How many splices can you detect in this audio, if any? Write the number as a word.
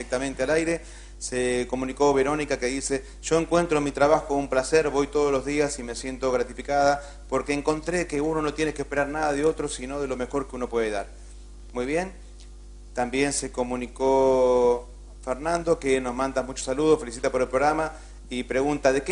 one